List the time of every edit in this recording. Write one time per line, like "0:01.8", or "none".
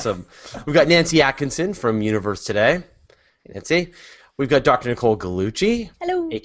0:02.8